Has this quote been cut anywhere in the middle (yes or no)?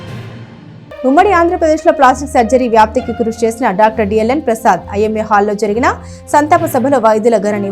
no